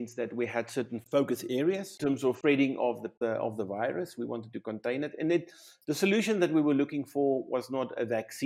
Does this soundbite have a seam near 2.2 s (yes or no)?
yes